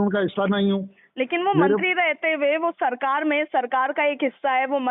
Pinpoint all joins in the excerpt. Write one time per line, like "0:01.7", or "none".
none